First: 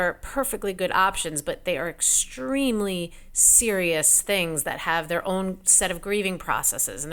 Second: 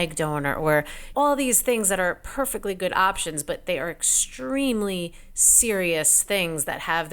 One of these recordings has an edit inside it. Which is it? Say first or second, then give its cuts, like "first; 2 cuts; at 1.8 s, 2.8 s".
second; 1 cut; at 1.0 s